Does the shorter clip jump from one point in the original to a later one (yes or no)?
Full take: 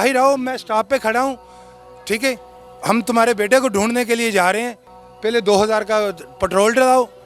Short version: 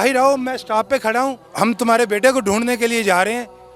yes